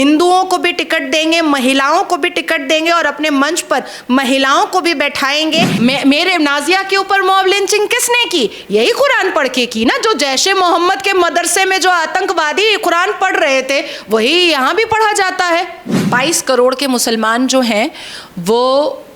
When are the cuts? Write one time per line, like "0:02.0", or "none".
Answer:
0:05.7
0:15.9